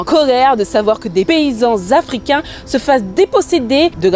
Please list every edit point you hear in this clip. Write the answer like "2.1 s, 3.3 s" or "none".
1.3 s